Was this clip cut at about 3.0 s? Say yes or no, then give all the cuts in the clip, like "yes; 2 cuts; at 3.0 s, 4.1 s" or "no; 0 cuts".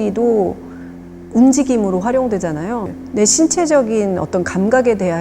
yes; 1 cut; at 3.0 s